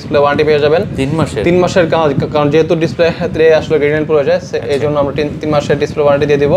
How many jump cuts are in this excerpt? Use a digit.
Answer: 0